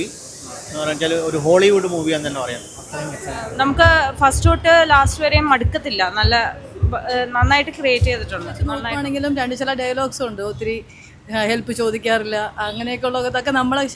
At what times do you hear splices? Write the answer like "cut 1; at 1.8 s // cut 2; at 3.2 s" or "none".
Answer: cut 1; at 3.5 s // cut 2; at 8.7 s